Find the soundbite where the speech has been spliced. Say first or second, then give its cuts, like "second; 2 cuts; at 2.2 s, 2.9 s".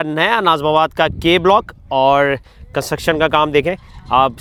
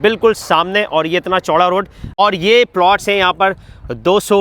second; 1 cut; at 2.2 s